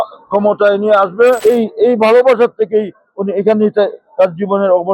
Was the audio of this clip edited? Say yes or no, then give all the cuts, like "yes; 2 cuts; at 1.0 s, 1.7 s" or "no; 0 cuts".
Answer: yes; 1 cut; at 1.4 s